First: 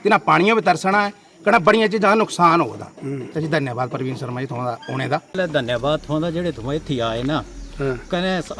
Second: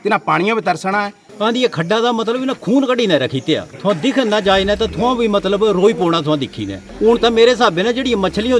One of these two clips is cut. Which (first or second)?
second